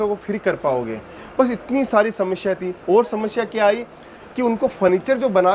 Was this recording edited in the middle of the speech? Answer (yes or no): no